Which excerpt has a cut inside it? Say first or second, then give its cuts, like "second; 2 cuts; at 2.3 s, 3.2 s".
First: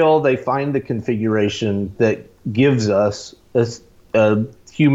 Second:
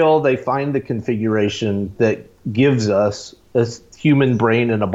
second; 1 cut; at 3.9 s